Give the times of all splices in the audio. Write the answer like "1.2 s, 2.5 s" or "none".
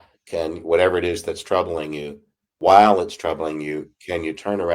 2.7 s

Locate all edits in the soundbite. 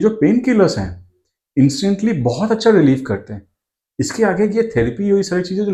none

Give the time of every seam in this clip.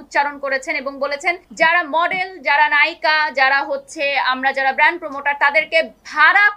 1.5 s

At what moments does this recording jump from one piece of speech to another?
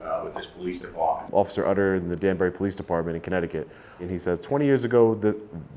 1.2 s, 4.1 s

